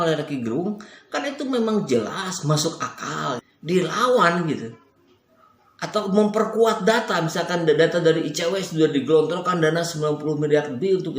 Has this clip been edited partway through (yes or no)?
yes